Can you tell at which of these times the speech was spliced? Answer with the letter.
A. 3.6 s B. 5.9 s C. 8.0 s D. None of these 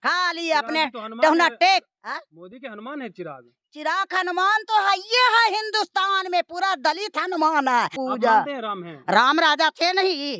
C